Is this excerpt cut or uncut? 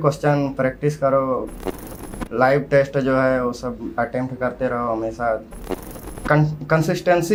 uncut